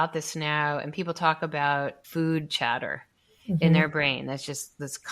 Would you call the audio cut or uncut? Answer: cut